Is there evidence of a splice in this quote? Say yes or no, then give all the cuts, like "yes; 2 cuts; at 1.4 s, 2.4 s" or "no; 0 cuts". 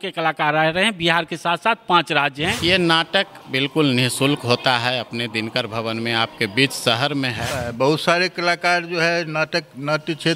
yes; 2 cuts; at 2.6 s, 7.6 s